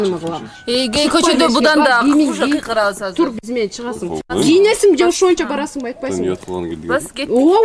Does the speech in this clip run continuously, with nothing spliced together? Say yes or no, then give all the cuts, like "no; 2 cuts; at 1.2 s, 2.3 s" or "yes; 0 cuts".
yes; 0 cuts